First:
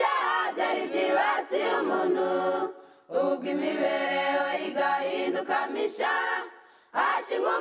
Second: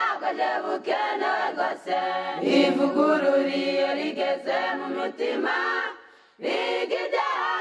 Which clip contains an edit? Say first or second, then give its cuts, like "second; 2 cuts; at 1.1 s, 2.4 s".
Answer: second; 1 cut; at 2.3 s